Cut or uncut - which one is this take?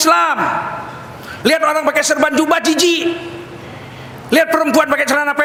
uncut